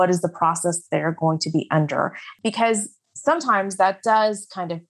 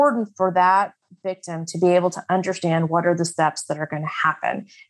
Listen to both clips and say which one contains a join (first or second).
first